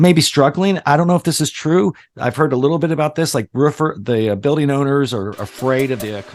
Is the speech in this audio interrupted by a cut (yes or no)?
no